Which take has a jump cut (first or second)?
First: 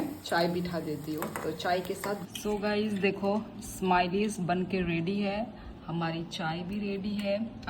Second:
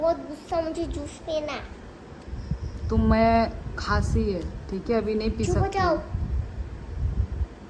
first